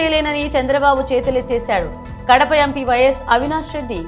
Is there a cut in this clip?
no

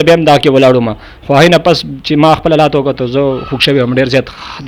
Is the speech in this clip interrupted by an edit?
no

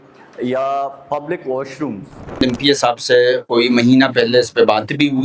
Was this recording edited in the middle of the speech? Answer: yes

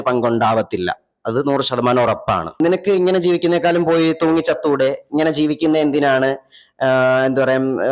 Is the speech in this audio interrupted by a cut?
yes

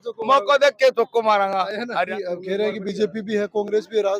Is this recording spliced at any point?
yes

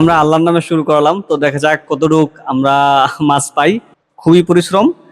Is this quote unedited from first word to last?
no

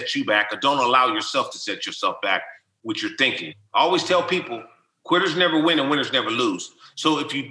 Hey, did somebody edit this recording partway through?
yes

